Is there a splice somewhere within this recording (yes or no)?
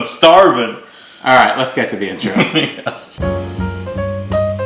yes